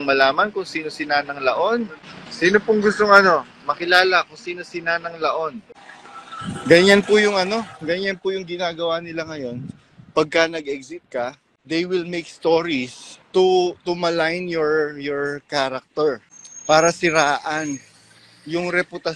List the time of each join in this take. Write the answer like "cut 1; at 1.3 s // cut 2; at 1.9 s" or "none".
cut 1; at 5.8 s